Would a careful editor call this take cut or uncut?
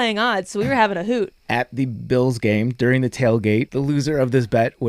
cut